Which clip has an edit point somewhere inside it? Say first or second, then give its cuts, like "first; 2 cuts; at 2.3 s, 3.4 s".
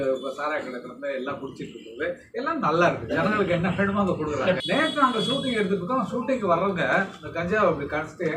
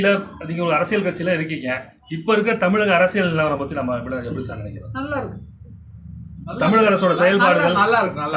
first; 1 cut; at 4.6 s